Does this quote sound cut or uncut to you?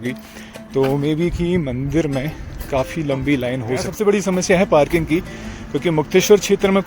cut